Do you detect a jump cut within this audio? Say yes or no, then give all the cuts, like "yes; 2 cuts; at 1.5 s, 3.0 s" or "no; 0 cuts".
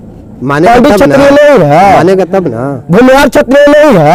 no; 0 cuts